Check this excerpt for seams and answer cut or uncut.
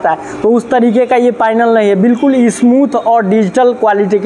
uncut